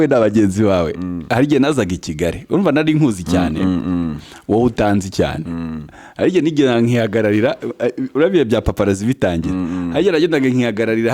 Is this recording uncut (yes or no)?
yes